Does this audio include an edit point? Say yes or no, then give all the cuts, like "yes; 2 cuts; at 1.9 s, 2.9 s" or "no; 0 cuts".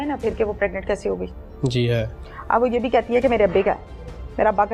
no; 0 cuts